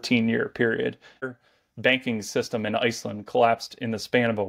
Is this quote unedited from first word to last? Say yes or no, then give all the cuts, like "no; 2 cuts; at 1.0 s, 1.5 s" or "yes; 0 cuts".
no; 1 cut; at 1.2 s